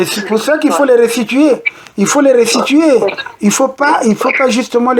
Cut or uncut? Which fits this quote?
uncut